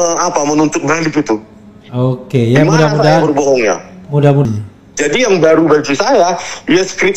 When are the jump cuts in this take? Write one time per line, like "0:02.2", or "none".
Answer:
0:04.5